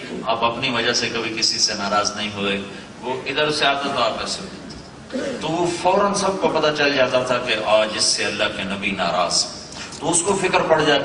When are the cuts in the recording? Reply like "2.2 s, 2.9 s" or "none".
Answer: 10.0 s